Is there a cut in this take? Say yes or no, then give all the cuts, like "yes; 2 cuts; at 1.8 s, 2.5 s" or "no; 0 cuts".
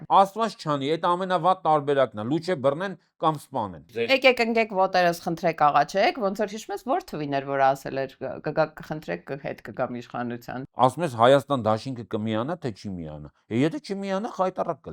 yes; 2 cuts; at 4.1 s, 10.6 s